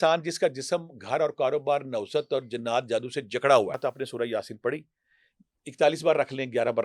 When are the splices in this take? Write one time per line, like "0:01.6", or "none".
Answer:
0:03.8